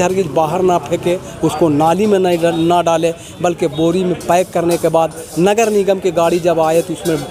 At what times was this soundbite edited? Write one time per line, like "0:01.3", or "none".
none